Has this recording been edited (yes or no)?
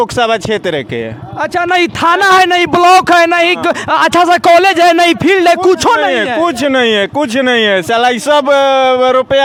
no